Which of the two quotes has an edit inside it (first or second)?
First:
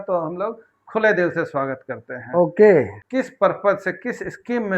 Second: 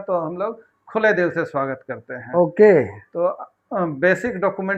first